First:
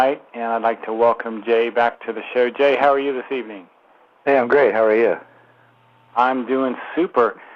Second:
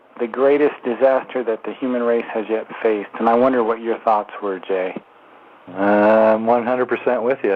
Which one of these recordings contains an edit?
first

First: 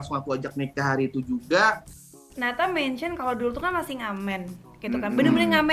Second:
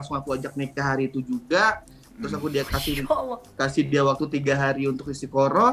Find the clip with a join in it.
first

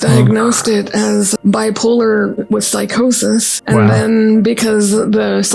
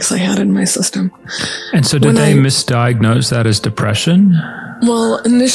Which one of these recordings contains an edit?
first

